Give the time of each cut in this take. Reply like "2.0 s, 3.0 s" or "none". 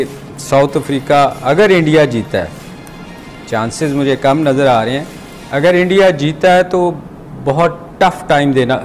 none